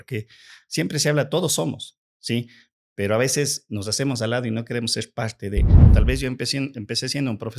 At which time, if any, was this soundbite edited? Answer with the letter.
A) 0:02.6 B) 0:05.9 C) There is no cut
B